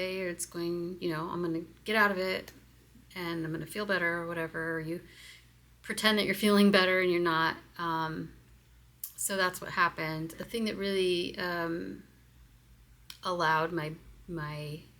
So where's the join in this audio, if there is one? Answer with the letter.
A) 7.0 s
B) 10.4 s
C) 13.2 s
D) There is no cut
B